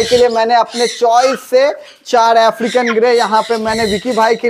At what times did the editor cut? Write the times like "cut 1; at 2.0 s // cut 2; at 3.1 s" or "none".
none